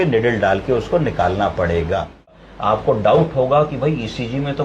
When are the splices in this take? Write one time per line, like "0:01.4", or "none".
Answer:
0:02.4